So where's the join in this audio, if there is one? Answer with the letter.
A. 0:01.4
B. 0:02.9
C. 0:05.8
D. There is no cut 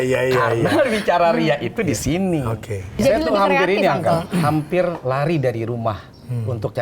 B